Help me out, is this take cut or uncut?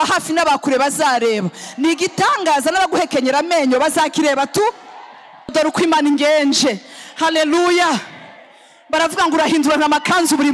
cut